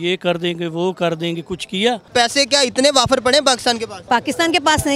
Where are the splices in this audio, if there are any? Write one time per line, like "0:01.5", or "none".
0:02.1
0:03.9